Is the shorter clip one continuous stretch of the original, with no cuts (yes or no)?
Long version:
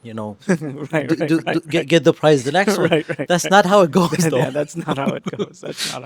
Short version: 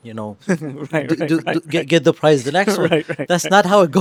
yes